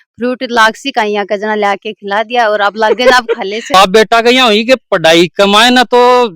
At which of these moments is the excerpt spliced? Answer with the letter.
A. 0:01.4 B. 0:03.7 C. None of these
B